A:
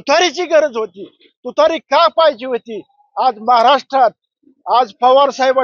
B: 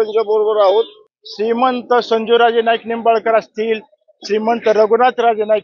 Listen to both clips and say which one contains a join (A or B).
B